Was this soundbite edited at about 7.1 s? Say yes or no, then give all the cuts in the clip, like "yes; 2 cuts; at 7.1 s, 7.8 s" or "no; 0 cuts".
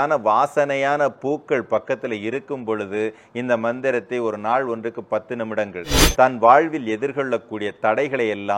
no; 1 cut; at 5.9 s